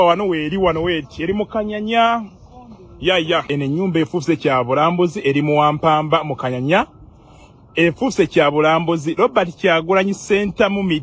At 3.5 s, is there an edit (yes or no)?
yes